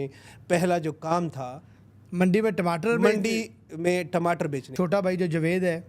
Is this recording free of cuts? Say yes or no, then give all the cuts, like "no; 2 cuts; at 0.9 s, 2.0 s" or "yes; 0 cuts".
no; 1 cut; at 4.7 s